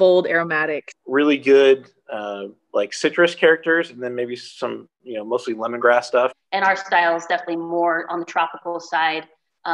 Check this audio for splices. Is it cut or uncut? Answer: cut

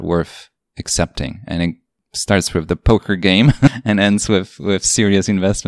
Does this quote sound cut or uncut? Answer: uncut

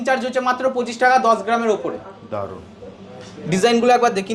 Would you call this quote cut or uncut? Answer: uncut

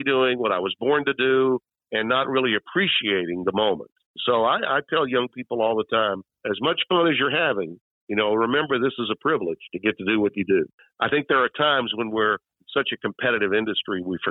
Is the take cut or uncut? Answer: cut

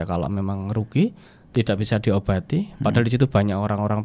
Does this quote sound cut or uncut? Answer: uncut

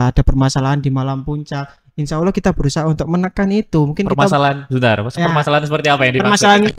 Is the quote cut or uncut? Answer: uncut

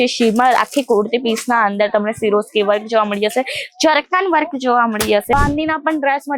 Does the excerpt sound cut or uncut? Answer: cut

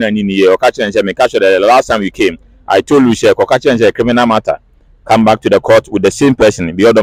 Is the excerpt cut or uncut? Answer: uncut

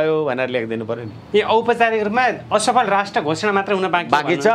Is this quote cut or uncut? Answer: uncut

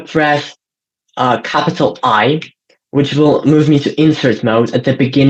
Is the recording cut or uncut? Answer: uncut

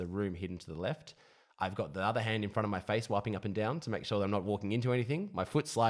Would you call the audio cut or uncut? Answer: uncut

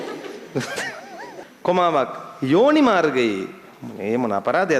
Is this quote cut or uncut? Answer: cut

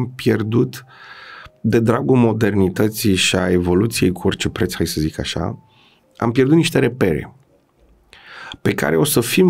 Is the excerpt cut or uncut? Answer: uncut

